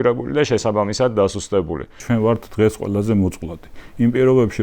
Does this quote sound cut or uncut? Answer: cut